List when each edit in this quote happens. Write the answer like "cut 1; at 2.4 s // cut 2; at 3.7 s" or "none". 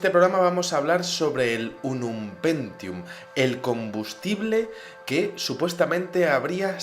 cut 1; at 2.1 s